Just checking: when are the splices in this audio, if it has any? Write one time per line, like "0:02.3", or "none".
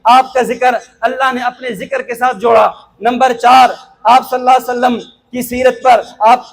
none